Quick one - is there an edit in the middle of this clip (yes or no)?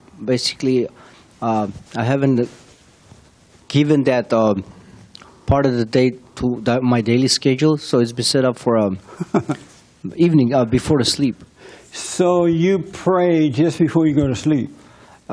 yes